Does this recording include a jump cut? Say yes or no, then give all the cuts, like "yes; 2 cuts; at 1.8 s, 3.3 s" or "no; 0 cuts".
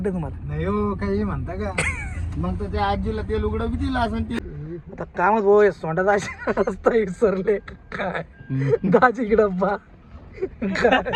yes; 1 cut; at 4.4 s